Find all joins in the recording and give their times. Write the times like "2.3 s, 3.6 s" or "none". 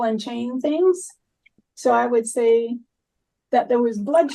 1.5 s